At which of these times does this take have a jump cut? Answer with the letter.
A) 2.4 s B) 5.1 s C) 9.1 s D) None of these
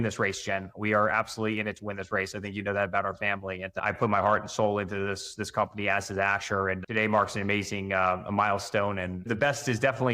C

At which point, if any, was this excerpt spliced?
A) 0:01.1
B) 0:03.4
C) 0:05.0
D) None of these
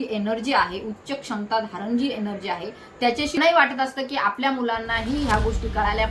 B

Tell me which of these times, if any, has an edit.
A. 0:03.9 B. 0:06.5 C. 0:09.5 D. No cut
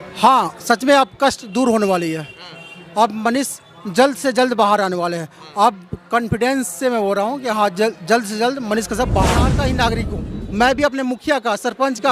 C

